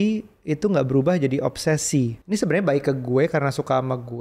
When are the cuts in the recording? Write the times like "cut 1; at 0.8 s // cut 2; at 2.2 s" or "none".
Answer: cut 1; at 2.2 s